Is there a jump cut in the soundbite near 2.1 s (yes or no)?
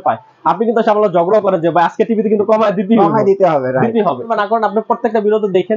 no